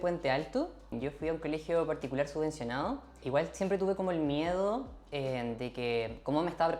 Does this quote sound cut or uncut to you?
cut